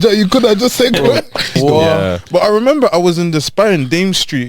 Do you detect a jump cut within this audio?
yes; 1 cut; at 1.5 s

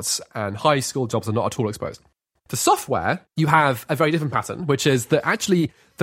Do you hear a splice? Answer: yes; 2 cuts; at 2.2 s, 3.3 s

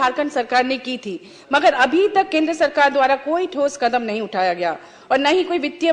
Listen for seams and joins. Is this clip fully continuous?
yes; 0 cuts

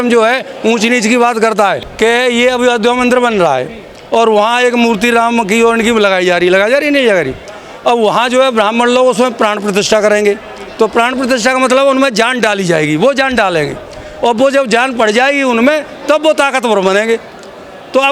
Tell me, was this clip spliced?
yes; 1 cut; at 1.8 s

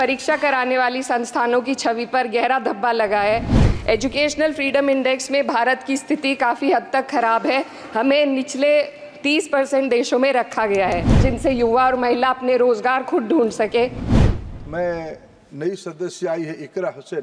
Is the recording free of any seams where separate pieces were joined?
no; 3 cuts; at 3.5 s, 11.2 s, 14.2 s

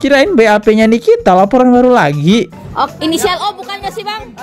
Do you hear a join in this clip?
yes; 1 cut; at 2.5 s

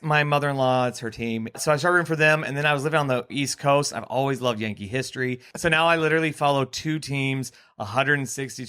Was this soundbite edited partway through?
yes; 3 cuts; at 1.6 s, 3.3 s, 5.5 s

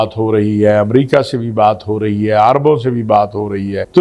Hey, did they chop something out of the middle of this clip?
no; 0 cuts

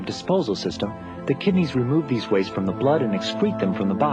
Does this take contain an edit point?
no; 0 cuts

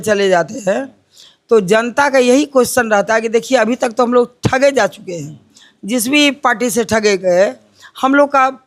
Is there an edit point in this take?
no; 0 cuts

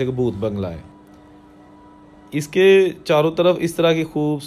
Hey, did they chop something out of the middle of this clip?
no; 0 cuts

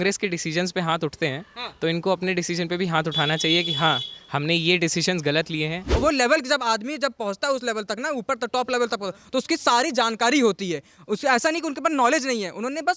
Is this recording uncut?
no; 1 cut; at 5.8 s

